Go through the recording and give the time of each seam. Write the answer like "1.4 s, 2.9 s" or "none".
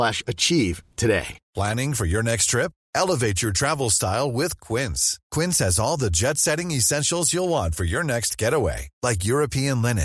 1.4 s